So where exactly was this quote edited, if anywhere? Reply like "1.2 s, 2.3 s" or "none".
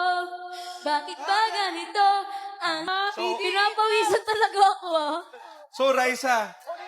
2.9 s